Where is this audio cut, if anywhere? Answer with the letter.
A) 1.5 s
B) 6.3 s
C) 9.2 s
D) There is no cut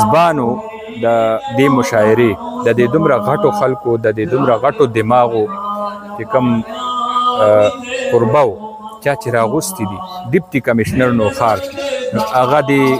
A